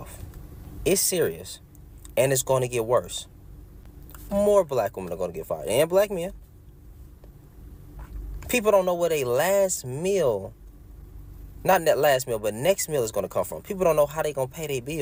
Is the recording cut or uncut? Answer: uncut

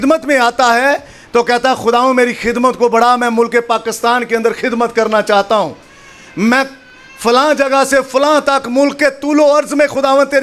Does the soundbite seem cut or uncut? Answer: uncut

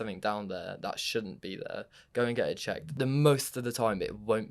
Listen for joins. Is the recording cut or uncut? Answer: cut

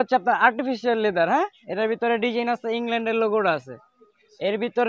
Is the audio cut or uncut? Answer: uncut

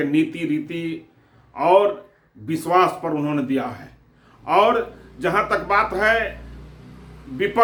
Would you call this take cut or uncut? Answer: uncut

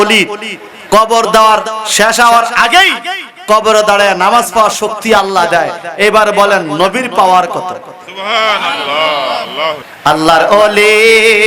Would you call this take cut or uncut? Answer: cut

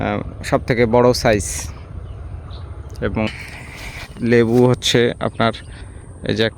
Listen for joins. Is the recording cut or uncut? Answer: cut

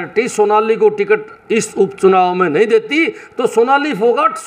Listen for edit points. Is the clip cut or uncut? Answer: uncut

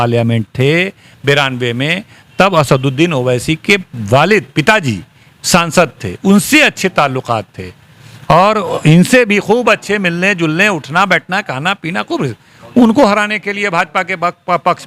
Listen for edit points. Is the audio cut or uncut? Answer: uncut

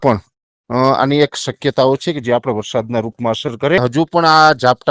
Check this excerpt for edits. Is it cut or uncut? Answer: cut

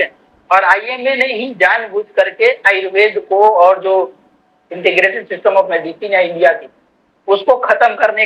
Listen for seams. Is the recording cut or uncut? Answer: uncut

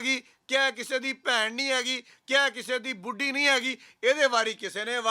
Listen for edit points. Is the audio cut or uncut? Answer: uncut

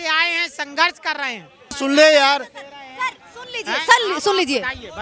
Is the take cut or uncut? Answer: cut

